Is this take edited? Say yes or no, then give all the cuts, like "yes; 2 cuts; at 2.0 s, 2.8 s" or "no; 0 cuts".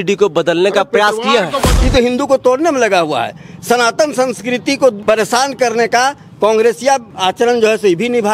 yes; 3 cuts; at 1.7 s, 5.0 s, 7.1 s